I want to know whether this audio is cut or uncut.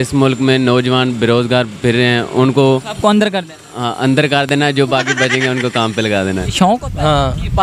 cut